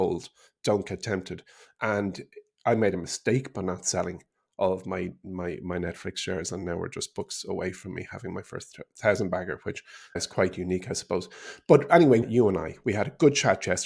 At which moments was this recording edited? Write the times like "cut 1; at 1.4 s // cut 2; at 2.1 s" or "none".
cut 1; at 10.2 s // cut 2; at 12.2 s